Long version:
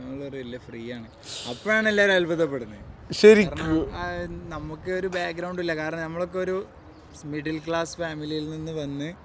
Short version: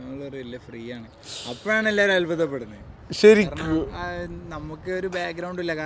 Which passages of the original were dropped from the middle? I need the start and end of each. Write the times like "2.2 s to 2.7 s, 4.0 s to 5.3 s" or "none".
none